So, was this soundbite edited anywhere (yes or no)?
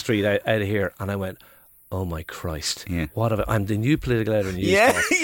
no